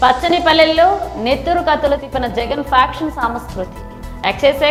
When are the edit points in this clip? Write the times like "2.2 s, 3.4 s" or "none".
none